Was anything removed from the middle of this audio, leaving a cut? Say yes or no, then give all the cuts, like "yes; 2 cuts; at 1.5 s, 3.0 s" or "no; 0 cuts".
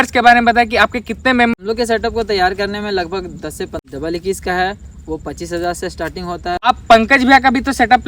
yes; 3 cuts; at 1.5 s, 3.8 s, 6.6 s